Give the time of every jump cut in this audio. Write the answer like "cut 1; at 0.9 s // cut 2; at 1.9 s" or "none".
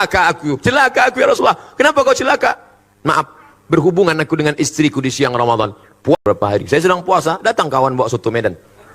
cut 1; at 6.2 s